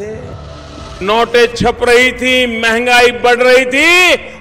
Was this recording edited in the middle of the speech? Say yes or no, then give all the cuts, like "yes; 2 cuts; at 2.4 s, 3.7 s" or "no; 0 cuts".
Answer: no; 0 cuts